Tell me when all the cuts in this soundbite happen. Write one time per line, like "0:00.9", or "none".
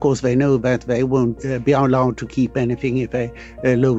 0:01.4